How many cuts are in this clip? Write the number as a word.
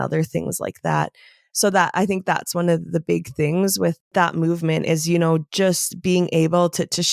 one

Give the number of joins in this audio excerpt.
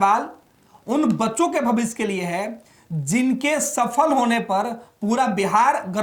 zero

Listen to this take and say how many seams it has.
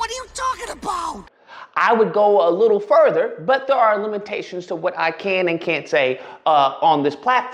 one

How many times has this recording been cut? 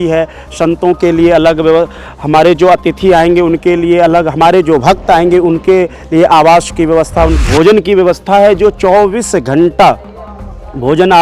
one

